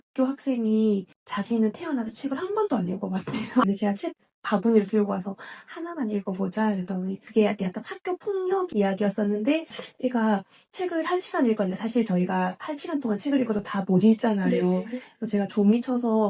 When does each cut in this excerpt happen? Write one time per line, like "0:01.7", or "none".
0:01.2
0:03.6
0:07.2
0:09.8